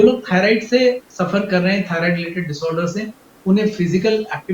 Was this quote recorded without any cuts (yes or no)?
no